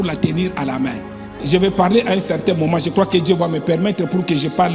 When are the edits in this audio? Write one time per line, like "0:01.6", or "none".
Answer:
0:01.4